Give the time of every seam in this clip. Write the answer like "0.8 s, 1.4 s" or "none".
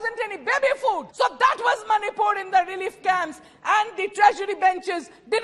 1.1 s